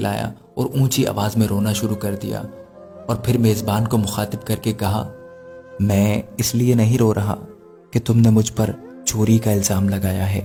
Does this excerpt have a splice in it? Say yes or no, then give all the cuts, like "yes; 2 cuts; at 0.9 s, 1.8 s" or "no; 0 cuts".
no; 0 cuts